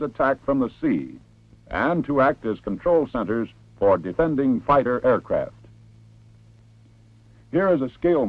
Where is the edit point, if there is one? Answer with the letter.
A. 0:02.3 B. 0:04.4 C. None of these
A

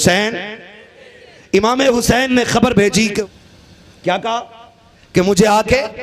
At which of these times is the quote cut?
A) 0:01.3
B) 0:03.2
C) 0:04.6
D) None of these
B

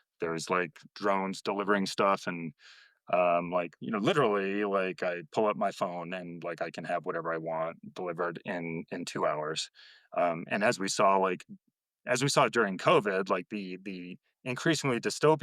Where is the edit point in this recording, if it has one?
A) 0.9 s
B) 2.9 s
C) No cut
A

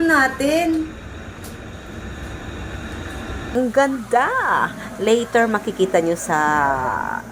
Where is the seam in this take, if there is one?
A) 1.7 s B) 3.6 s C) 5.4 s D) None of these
B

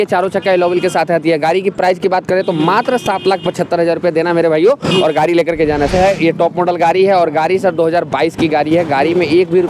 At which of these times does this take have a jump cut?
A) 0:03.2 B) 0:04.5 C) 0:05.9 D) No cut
C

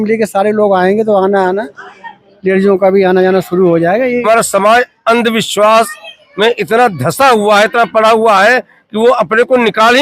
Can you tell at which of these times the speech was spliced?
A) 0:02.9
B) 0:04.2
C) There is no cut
B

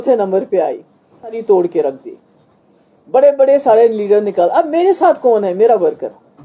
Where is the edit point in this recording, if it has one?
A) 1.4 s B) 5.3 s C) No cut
A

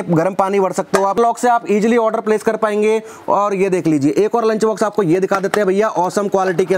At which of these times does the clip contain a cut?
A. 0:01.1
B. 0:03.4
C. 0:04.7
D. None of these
A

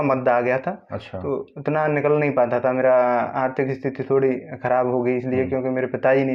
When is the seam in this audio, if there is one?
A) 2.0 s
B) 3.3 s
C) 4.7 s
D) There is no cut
D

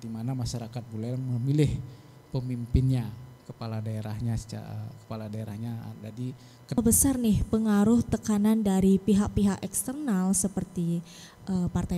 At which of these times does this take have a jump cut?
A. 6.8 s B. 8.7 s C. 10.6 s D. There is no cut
A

